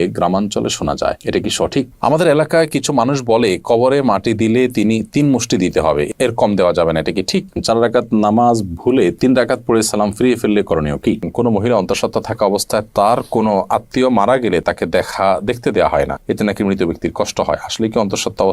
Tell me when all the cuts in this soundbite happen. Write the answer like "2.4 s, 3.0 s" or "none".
1.9 s, 7.6 s, 11.3 s